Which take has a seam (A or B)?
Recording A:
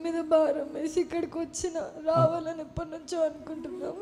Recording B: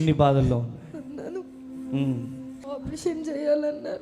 B